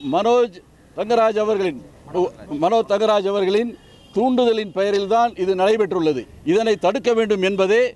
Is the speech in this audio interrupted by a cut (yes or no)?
yes